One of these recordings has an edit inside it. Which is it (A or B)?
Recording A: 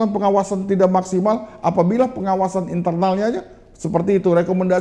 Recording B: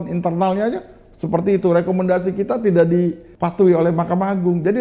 B